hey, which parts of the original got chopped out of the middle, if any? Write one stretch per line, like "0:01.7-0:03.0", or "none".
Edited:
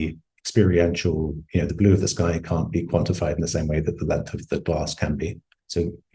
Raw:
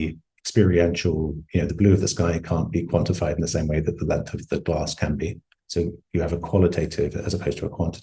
none